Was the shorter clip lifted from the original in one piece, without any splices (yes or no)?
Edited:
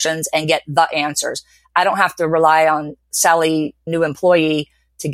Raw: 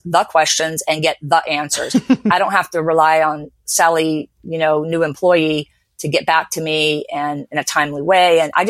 no